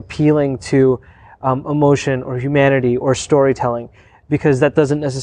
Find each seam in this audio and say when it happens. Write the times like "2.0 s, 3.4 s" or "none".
none